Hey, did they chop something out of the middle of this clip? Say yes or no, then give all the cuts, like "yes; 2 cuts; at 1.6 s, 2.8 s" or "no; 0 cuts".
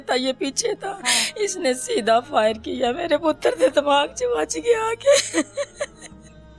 yes; 1 cut; at 5.5 s